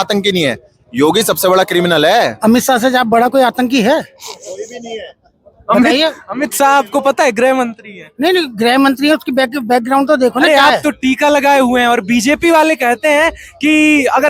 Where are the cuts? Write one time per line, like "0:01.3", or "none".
0:02.3
0:10.5